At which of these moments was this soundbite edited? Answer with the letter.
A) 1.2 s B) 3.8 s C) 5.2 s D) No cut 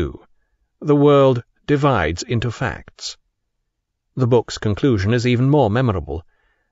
D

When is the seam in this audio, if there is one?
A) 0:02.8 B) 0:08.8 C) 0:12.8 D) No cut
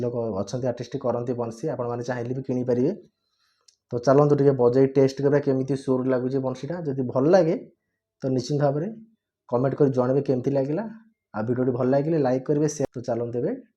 C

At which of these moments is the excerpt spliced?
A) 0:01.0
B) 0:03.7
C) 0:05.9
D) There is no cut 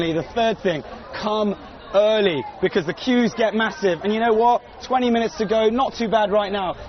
C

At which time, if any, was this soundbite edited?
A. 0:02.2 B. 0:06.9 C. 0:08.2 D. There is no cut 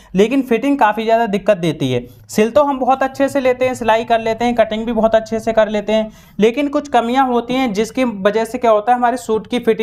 D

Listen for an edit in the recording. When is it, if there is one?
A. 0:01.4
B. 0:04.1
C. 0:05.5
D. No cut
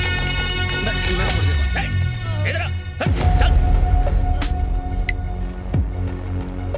A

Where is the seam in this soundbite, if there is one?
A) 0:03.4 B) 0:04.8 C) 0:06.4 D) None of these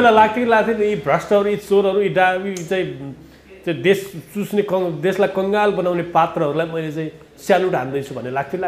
D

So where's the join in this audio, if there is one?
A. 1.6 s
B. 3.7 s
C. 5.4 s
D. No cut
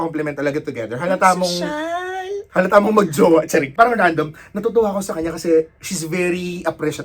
B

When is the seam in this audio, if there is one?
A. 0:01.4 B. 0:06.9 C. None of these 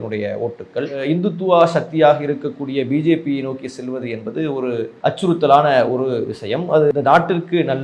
B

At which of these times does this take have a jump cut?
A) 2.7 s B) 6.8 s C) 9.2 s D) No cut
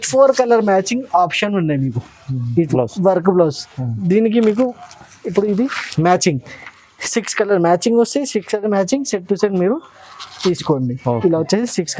A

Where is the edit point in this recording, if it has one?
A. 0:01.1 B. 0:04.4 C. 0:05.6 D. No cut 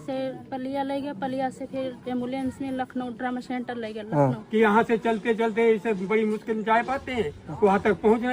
B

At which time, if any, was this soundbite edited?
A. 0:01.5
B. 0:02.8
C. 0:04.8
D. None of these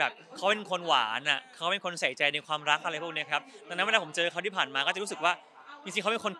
D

